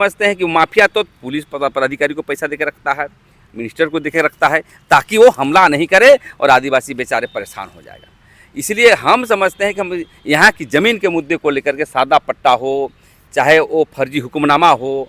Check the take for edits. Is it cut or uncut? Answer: uncut